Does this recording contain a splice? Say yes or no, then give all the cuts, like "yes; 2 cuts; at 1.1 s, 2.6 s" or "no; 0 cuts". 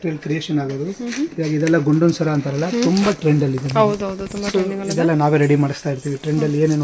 no; 0 cuts